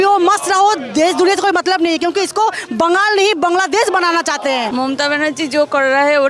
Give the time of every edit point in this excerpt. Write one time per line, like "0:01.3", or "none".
0:04.7